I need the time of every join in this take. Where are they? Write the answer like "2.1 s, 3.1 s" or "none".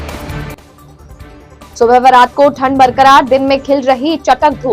none